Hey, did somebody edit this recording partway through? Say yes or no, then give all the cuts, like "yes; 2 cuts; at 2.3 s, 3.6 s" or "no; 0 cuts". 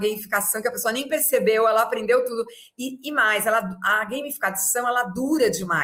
no; 0 cuts